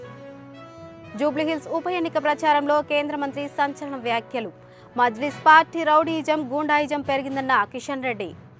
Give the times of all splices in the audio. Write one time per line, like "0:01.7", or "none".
none

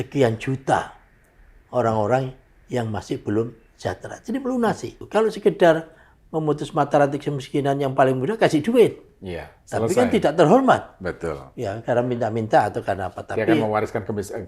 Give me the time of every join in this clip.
0:05.0

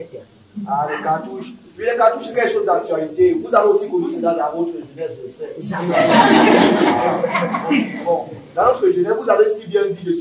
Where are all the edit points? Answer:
none

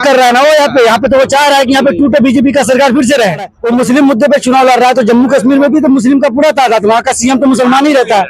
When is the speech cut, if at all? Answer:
0:03.6

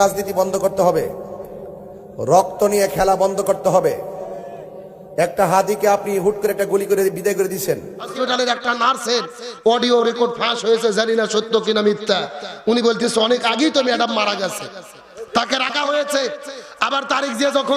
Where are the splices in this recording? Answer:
0:08.1

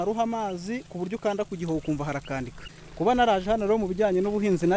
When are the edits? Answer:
0:02.7

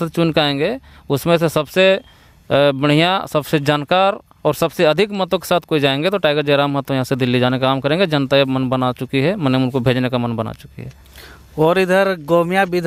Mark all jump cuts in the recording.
none

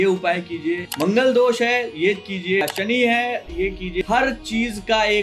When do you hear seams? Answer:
0:00.9
0:02.6
0:04.0

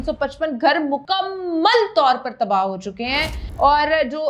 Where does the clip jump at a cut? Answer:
0:01.1

